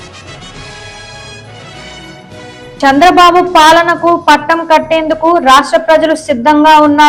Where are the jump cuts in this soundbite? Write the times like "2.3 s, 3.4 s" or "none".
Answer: none